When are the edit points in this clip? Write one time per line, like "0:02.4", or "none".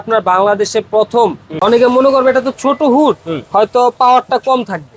0:01.4